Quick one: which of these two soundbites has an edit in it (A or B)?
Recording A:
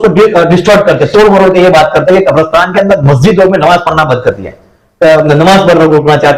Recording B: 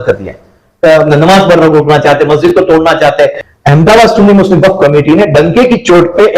B